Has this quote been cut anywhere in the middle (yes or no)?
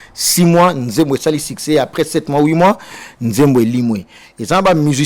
no